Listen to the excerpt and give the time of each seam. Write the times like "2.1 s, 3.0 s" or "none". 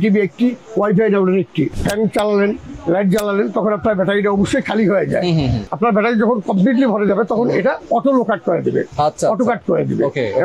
1.7 s, 5.6 s